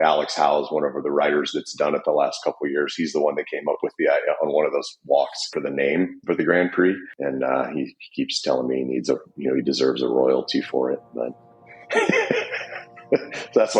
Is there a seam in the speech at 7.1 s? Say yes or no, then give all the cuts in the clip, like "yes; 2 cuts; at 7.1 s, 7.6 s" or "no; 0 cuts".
yes; 2 cuts; at 5.5 s, 7.1 s